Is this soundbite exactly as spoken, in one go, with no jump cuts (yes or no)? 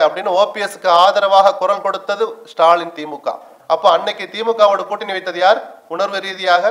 no